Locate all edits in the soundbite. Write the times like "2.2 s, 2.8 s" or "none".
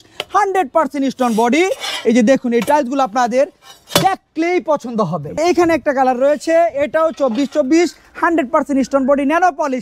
5.4 s